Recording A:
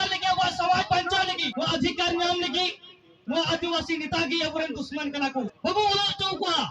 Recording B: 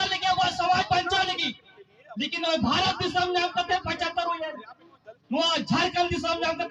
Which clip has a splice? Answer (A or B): A